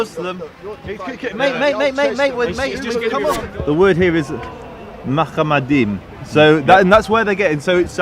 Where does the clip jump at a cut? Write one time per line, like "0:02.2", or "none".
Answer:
0:03.5